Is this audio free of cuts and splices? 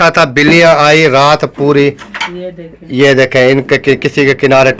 yes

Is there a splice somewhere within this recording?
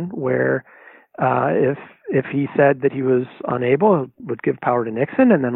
no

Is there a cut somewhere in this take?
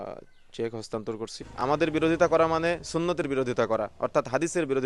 yes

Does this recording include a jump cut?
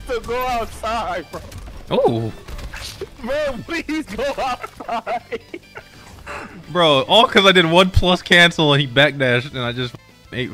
yes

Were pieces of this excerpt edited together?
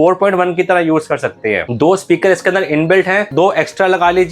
yes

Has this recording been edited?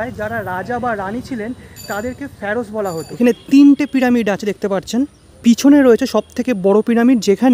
yes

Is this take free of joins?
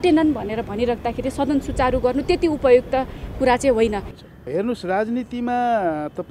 no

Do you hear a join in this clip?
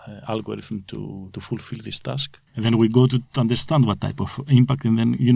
yes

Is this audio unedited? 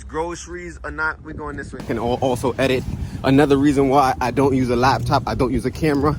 no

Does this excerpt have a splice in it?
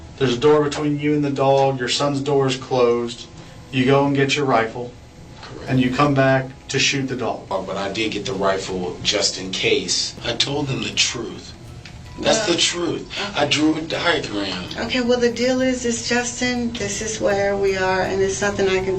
yes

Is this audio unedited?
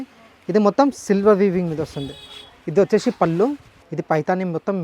no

